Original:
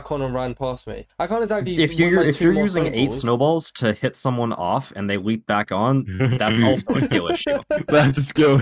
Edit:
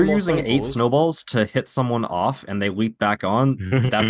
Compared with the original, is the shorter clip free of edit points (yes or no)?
yes